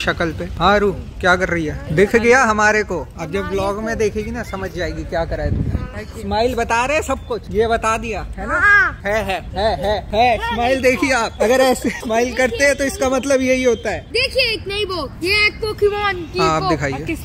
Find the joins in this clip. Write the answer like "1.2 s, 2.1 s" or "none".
none